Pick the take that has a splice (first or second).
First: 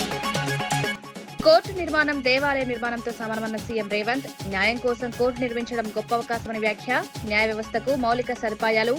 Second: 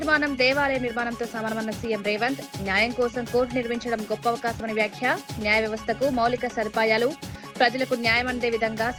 first